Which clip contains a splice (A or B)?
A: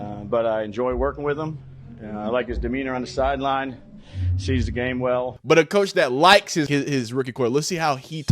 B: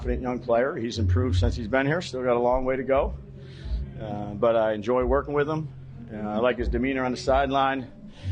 A